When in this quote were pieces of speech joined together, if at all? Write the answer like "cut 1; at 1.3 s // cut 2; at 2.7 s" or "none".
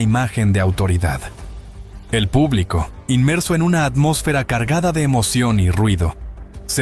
none